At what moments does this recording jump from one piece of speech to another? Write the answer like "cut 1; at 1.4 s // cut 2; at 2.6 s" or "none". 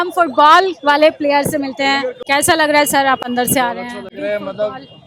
none